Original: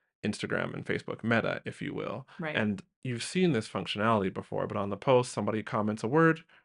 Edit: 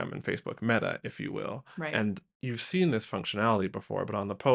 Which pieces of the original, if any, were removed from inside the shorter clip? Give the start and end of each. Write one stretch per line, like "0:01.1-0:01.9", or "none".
none